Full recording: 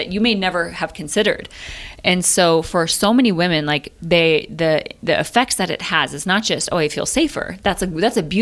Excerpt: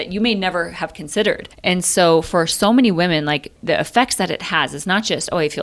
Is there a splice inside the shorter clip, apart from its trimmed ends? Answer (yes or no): yes